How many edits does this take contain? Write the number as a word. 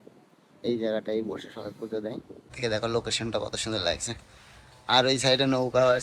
one